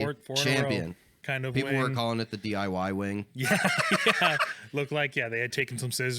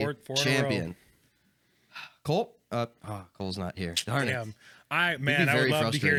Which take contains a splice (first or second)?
first